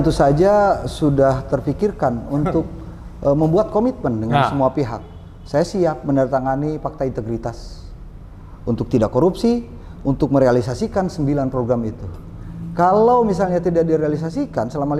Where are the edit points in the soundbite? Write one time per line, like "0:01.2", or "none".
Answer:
none